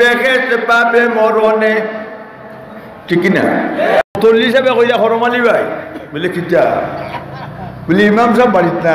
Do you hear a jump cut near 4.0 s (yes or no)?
yes